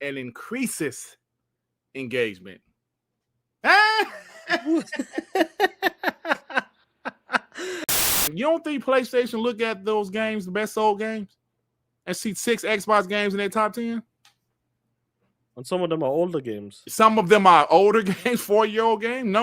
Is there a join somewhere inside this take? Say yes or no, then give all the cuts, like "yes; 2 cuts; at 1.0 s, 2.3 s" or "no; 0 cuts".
yes; 1 cut; at 7.9 s